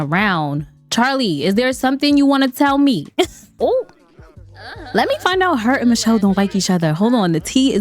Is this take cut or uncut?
cut